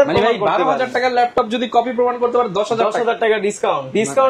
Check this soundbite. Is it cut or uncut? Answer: uncut